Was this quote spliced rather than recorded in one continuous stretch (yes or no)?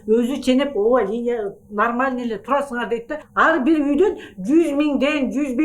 yes